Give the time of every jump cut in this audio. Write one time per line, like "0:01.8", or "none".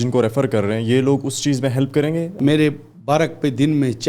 0:02.3